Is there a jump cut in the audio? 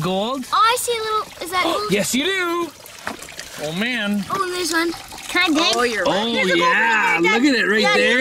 no; 0 cuts

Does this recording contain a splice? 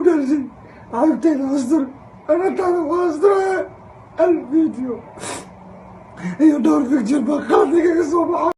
no; 0 cuts

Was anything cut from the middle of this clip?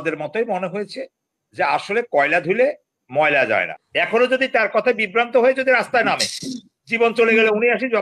yes; 1 cut; at 3.8 s

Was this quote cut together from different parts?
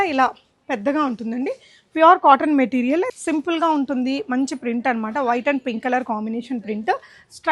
yes; 1 cut; at 3.1 s

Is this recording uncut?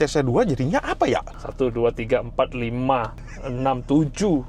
no; 1 cut; at 1.4 s

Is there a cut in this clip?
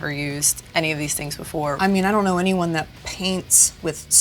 yes; 1 cut; at 1.8 s

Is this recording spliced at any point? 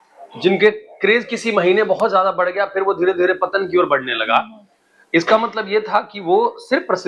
no; 0 cuts

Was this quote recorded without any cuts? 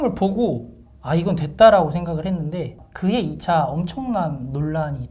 no; 1 cut; at 2.8 s

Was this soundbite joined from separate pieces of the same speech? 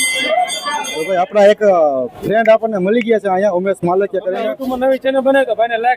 yes; 2 cuts; at 0.9 s, 4.6 s

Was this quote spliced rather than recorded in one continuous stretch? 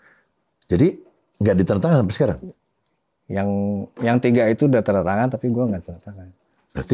no; 0 cuts

